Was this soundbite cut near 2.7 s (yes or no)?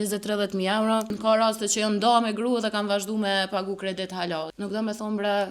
no